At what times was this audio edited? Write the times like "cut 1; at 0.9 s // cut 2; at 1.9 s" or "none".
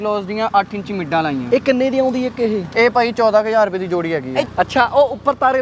cut 1; at 4.5 s